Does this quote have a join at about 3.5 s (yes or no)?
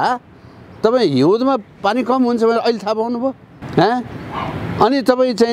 yes